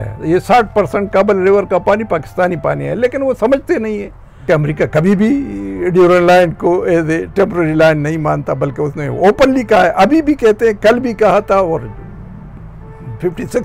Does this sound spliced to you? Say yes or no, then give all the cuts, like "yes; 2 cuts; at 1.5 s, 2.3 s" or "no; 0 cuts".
yes; 1 cut; at 4.4 s